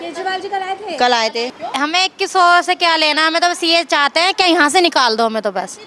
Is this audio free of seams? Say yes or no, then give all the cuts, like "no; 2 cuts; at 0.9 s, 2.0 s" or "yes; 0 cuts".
no; 1 cut; at 1.6 s